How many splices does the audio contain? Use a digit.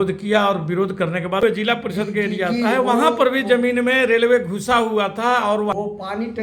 2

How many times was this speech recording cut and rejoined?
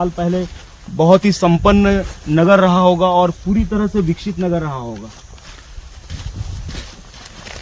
0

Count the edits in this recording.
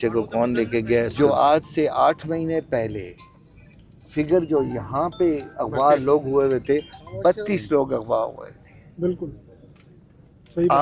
1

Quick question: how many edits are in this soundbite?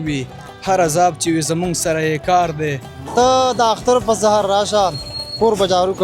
1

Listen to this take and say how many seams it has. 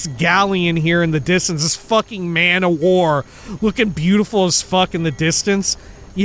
0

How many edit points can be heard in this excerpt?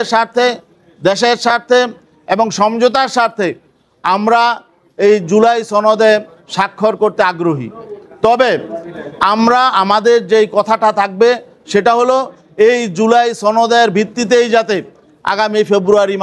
0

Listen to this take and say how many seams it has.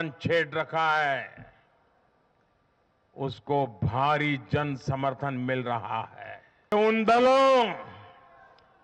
1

